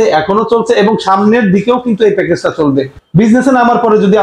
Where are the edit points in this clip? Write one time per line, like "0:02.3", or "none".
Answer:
0:03.0